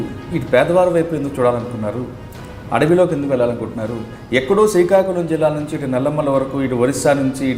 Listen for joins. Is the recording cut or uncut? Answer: uncut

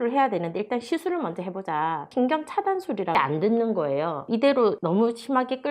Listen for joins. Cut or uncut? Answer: cut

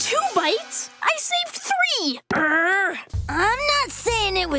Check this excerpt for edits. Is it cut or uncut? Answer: cut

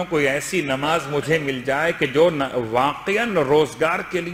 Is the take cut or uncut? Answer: uncut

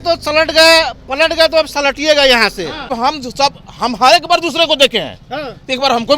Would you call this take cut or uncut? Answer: cut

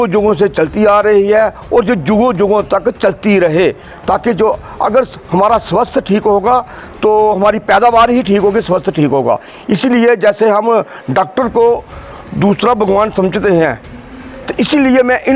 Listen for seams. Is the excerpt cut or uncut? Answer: uncut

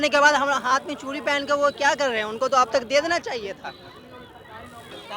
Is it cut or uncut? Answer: uncut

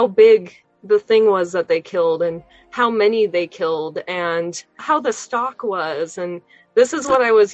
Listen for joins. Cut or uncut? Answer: cut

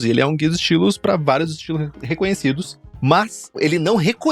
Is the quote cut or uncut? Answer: cut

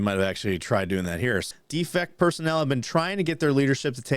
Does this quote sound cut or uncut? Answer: cut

